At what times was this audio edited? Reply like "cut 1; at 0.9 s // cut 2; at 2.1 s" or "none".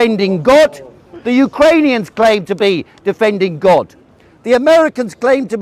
none